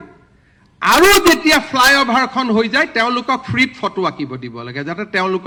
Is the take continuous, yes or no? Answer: yes